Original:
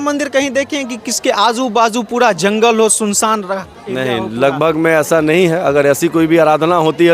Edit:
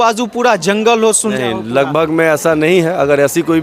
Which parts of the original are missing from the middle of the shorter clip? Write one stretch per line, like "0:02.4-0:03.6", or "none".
0:03.1-0:04.0